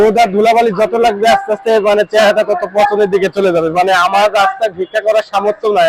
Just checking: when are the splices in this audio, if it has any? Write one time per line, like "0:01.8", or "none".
none

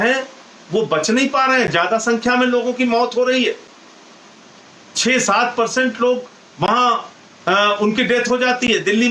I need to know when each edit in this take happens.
none

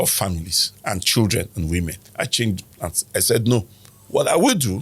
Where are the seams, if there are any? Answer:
0:02.0

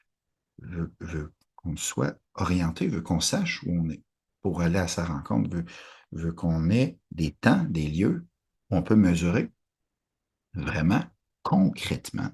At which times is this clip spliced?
0:07.0

